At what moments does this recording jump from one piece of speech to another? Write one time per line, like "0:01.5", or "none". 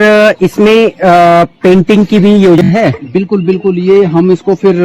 0:02.6